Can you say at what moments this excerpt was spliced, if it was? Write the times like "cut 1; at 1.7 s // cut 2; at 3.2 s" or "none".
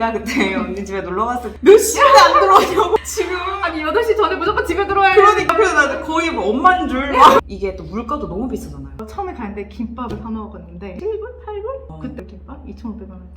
cut 1; at 7.5 s // cut 2; at 8.9 s // cut 3; at 10.9 s